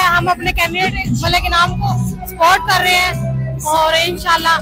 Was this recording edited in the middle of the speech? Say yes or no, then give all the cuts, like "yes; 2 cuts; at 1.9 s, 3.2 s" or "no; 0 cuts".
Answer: no; 0 cuts